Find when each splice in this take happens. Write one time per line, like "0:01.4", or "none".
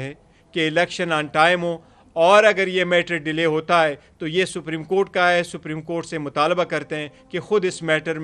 none